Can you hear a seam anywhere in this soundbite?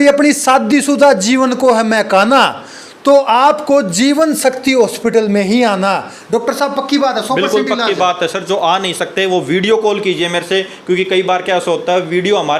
no; 0 cuts

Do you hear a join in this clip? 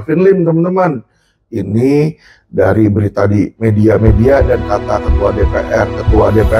no; 0 cuts

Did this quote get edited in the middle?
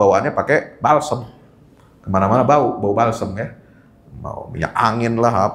no; 0 cuts

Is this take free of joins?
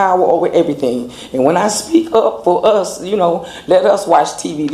yes; 0 cuts

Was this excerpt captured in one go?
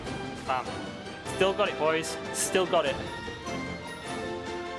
yes; 0 cuts

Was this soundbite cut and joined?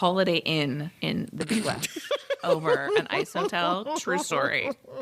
yes; 1 cut; at 0.9 s

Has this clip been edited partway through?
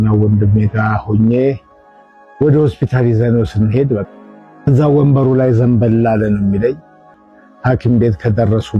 no; 0 cuts

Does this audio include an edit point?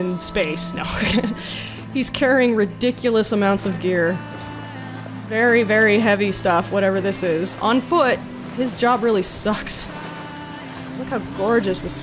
no; 0 cuts

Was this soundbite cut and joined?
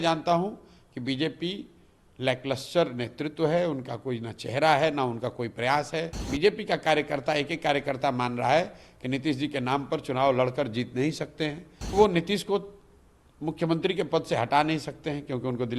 yes; 2 cuts; at 6.2 s, 11.7 s

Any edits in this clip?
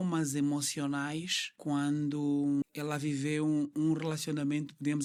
no; 0 cuts

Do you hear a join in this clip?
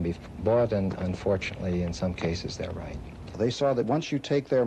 yes; 1 cut; at 3.4 s

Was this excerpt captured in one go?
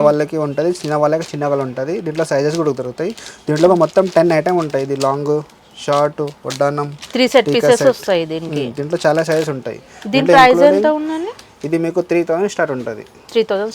yes; 0 cuts

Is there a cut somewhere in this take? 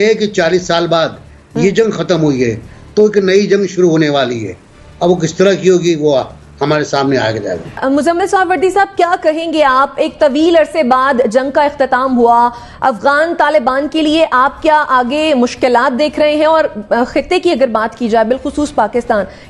no; 0 cuts

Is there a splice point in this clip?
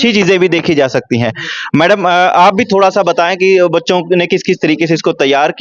no; 0 cuts

